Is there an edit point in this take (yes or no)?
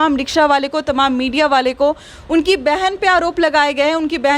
no